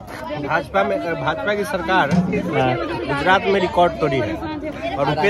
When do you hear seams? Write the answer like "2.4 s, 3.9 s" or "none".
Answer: none